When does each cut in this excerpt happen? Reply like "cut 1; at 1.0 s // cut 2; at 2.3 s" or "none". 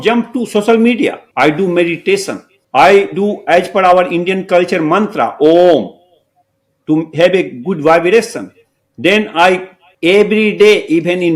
none